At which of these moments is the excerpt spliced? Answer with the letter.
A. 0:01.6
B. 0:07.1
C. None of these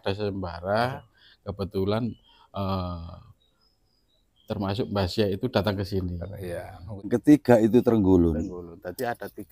B